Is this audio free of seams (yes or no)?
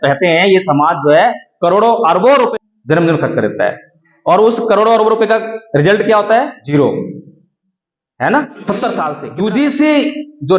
no